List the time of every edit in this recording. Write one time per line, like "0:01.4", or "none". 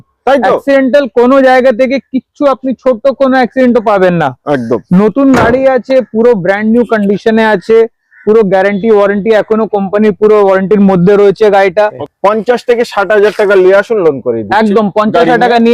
0:12.1